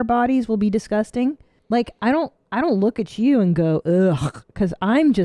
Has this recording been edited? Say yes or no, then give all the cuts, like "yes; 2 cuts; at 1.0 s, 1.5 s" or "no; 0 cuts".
yes; 1 cut; at 1.5 s